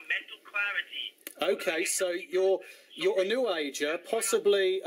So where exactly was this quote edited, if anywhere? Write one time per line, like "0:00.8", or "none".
none